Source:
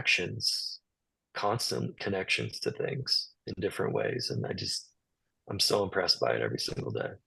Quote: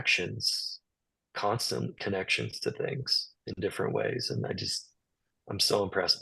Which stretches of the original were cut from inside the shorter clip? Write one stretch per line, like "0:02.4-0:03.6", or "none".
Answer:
none